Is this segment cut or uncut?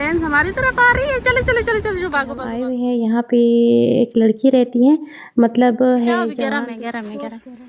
cut